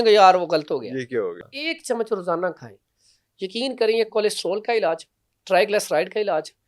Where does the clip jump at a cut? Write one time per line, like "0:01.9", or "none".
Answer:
0:01.4